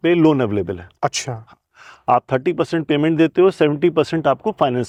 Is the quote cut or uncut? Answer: uncut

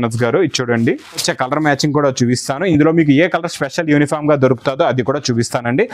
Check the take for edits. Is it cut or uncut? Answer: cut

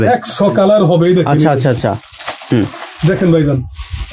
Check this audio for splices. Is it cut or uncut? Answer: uncut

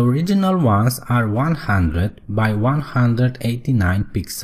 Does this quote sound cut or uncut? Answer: cut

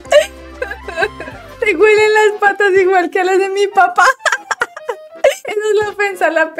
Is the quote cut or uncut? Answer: uncut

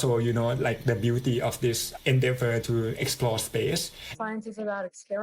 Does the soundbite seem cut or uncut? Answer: cut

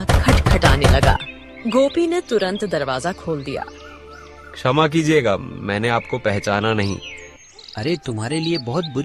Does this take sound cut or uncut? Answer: uncut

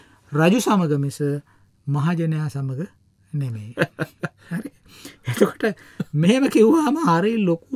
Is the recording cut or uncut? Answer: uncut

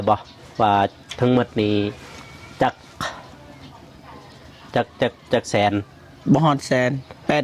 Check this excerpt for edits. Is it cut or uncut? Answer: uncut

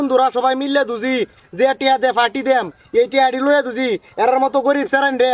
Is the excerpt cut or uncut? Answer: uncut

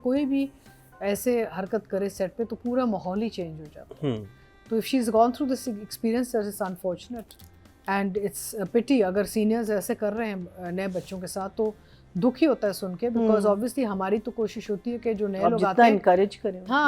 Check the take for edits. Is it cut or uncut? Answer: uncut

